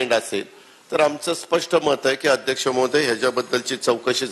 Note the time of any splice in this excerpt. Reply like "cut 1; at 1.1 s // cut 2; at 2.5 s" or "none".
none